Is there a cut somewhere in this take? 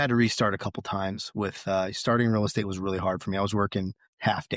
no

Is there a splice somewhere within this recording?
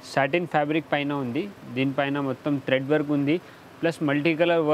no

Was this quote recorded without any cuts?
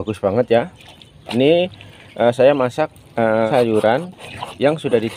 no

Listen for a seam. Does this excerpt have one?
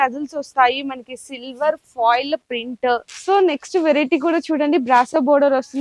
yes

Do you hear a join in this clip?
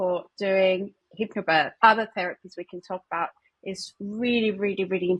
yes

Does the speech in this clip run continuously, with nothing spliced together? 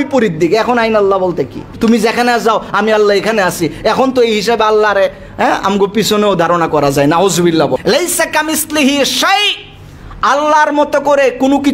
no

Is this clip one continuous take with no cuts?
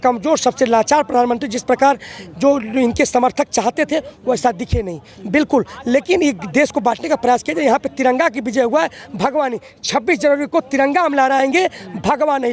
yes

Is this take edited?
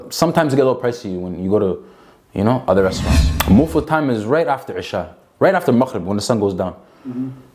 yes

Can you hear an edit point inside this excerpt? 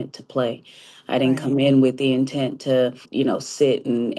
yes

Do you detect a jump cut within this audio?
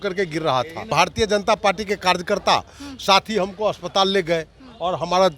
yes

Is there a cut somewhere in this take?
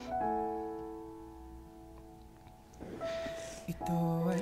no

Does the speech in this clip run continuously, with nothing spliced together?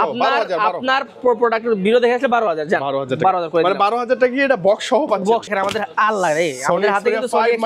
no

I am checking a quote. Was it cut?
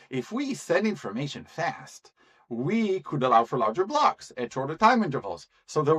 no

